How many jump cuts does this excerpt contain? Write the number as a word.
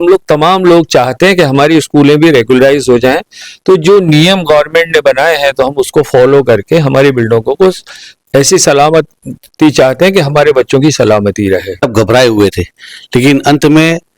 one